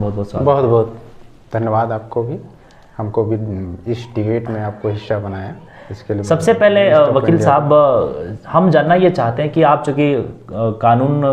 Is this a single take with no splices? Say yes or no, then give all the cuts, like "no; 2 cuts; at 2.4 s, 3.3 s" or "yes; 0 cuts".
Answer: yes; 0 cuts